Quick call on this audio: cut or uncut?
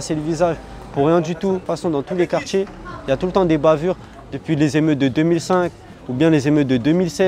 cut